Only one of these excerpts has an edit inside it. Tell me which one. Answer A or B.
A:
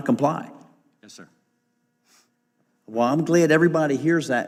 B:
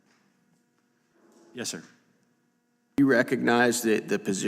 B